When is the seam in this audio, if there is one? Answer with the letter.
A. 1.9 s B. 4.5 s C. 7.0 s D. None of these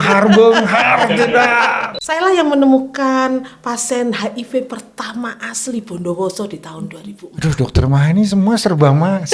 A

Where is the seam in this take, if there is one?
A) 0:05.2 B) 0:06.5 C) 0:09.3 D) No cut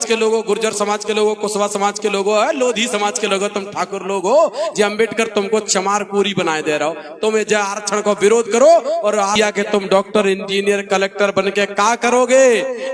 C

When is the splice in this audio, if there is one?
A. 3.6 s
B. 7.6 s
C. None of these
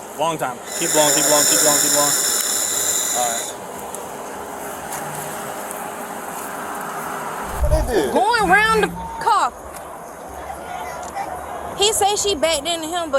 B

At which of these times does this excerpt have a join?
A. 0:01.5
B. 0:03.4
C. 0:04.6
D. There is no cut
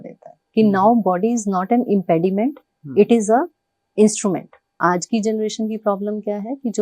C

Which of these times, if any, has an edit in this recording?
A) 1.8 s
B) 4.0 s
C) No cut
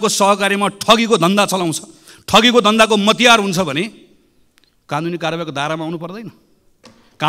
C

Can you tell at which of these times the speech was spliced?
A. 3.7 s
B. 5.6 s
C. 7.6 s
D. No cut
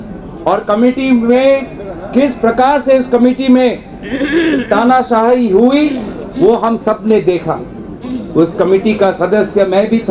D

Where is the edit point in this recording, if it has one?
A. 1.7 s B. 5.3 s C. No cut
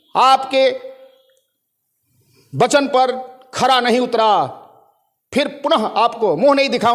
C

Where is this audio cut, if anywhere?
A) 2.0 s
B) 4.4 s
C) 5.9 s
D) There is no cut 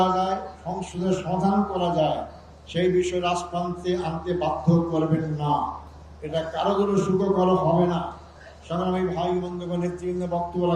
D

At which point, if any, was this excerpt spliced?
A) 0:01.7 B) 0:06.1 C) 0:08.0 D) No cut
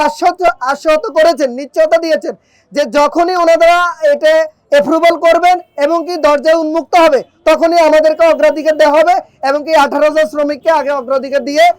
D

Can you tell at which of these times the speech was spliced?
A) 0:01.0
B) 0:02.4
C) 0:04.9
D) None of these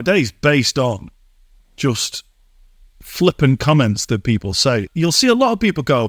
C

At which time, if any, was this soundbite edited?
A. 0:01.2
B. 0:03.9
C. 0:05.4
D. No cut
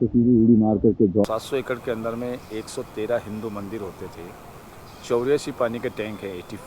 A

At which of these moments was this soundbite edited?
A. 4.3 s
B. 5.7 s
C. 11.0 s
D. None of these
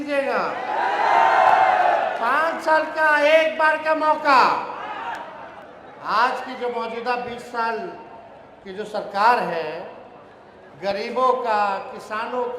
B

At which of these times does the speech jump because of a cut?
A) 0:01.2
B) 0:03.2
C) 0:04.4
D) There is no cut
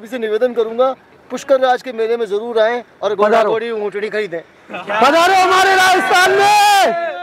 D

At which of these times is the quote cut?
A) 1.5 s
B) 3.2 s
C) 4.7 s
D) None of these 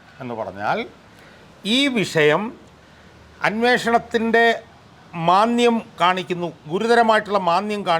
D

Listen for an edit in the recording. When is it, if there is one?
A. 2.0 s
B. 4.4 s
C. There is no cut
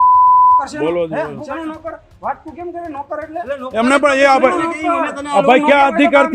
C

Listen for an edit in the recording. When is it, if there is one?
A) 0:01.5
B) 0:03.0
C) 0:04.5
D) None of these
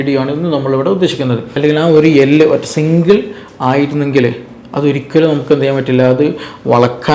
A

